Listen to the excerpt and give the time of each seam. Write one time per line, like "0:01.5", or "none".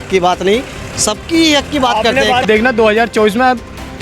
0:02.4

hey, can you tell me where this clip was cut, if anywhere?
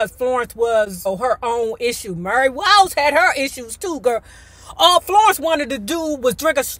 0:01.0

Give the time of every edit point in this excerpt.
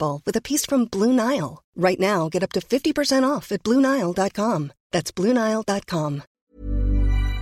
0:06.4

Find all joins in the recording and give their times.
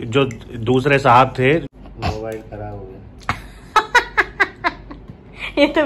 0:01.7

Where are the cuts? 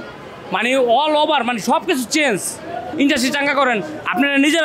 0:02.8

